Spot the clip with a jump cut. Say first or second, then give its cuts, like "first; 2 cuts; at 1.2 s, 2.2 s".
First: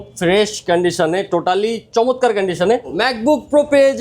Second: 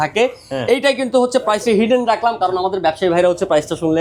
first; 1 cut; at 2.9 s